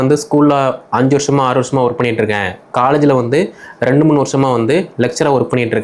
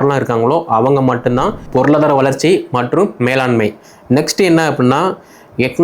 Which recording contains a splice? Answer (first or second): second